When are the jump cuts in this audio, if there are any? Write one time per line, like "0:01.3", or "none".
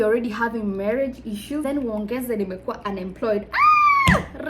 0:01.6